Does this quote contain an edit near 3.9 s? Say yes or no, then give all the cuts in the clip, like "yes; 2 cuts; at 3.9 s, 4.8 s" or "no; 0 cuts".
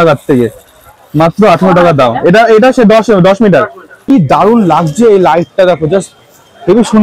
yes; 1 cut; at 3.9 s